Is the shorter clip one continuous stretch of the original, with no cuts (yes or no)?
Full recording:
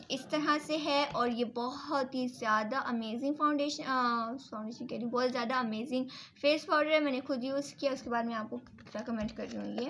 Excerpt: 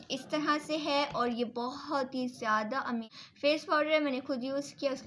no